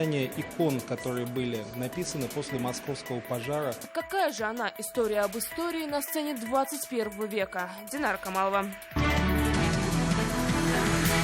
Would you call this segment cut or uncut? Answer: cut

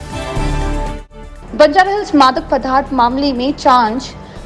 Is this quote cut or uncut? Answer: cut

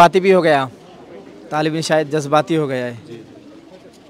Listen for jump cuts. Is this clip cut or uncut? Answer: uncut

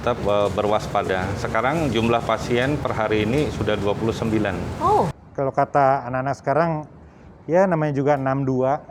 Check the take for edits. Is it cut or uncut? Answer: cut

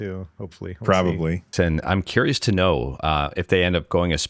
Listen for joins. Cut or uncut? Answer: cut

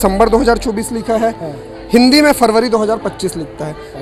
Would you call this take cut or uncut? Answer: uncut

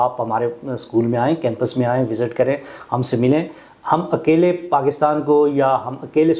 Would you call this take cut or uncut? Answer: uncut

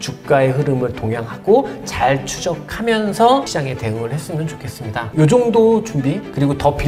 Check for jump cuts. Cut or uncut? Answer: uncut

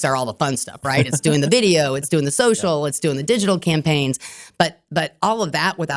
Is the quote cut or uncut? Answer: uncut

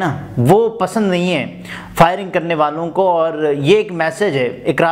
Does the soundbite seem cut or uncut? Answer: uncut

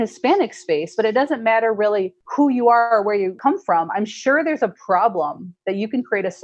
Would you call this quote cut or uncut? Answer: cut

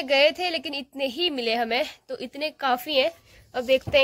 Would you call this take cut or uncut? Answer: uncut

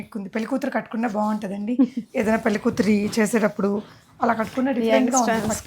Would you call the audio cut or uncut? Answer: uncut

